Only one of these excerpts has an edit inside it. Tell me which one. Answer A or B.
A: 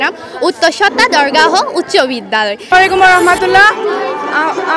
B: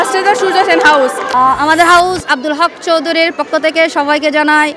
A